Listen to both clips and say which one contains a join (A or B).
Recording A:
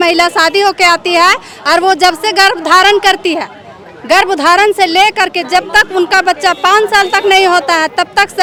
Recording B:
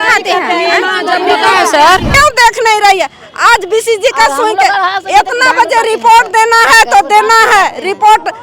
B